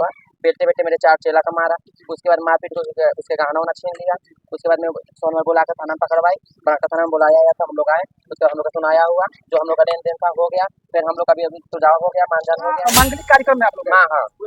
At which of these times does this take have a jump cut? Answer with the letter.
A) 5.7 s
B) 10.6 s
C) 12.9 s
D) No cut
C